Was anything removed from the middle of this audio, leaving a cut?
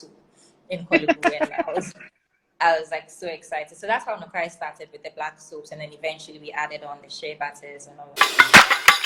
yes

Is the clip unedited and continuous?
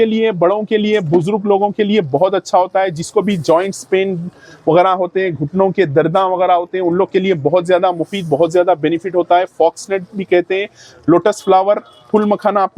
yes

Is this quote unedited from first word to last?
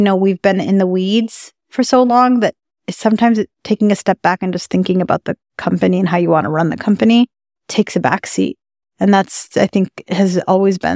yes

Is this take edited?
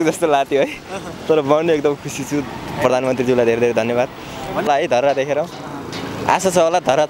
yes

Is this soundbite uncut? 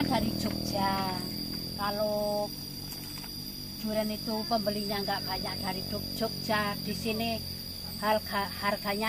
yes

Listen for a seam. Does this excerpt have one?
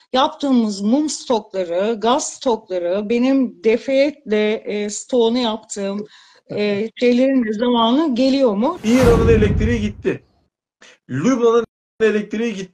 yes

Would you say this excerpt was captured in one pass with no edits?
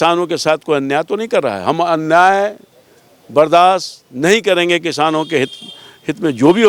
yes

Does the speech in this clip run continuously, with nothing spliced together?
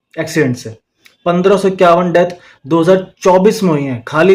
yes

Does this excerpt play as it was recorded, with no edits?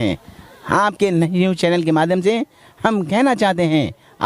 yes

